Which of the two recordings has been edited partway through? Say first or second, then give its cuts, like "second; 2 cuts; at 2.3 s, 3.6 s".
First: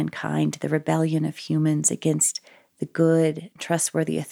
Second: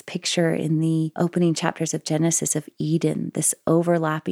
second; 1 cut; at 1.1 s